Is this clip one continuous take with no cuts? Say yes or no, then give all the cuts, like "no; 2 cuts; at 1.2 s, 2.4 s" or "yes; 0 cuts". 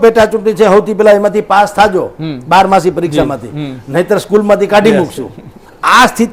yes; 0 cuts